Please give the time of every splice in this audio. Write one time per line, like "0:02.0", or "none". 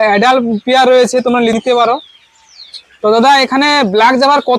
none